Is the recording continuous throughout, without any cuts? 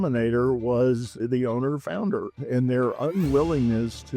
no; 1 cut; at 1.3 s

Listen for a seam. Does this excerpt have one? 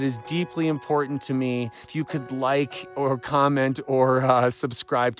yes; 1 cut; at 1.9 s

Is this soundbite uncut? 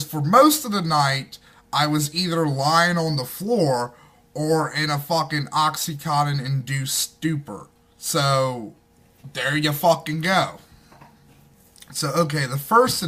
no; 1 cut; at 6.4 s

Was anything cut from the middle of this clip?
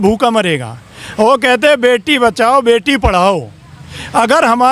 no; 0 cuts

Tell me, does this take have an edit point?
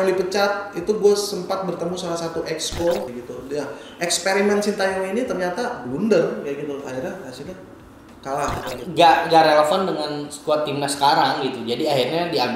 yes; 2 cuts; at 3.1 s, 8.8 s

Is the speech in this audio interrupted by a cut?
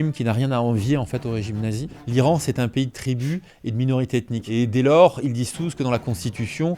yes; 2 cuts; at 1.9 s, 4.5 s

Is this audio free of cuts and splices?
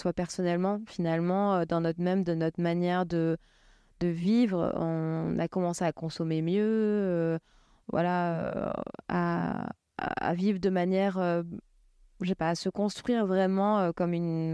yes; 0 cuts

